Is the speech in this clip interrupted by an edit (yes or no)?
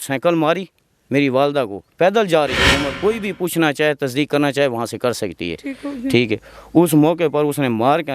yes